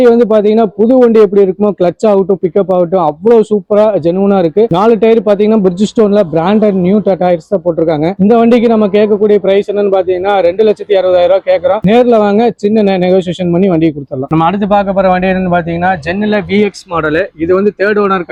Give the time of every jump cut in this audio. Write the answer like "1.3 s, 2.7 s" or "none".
none